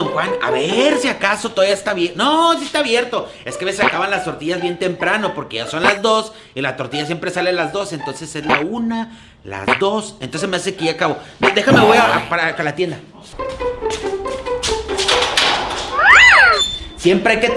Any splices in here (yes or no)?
no